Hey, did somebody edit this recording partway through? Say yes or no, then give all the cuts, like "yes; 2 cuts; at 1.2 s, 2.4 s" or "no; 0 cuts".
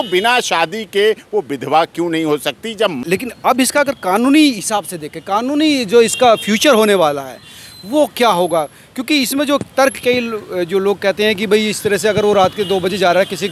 yes; 1 cut; at 3.0 s